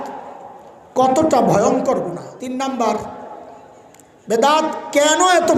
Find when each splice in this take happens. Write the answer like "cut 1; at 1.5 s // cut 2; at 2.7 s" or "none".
cut 1; at 2.3 s